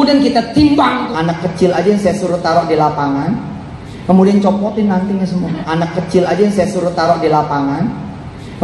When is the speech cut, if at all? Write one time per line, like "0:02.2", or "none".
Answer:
0:01.1
0:05.6